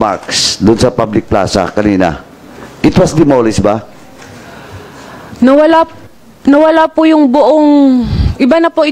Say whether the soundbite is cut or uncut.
uncut